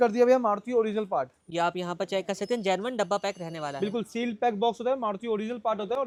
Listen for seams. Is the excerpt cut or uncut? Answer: uncut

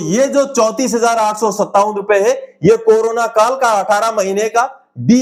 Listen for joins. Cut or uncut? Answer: uncut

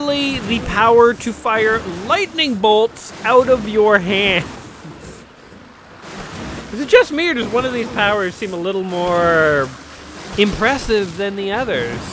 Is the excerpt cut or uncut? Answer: uncut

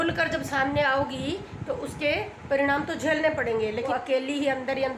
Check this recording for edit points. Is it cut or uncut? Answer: cut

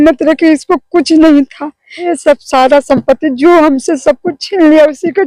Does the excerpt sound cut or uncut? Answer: cut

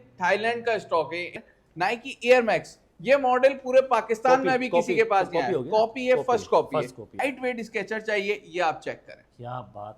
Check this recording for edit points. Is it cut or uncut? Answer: cut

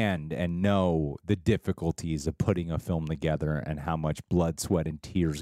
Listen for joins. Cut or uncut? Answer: uncut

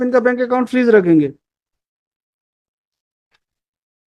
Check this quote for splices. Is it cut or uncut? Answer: uncut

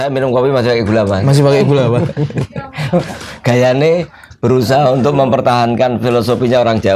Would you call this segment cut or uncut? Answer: uncut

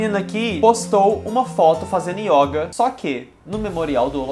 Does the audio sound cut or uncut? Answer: uncut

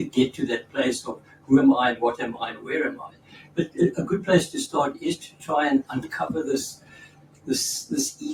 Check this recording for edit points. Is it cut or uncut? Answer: uncut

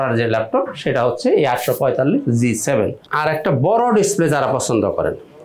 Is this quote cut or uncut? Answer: cut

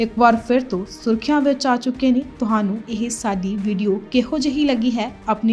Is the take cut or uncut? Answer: cut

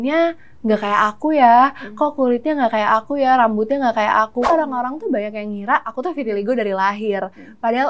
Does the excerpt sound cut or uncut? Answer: cut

